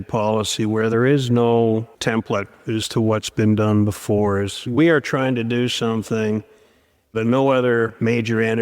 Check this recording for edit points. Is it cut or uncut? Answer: cut